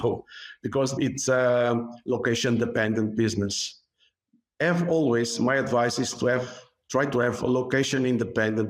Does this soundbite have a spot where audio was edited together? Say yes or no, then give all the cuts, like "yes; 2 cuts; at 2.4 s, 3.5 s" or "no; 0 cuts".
no; 0 cuts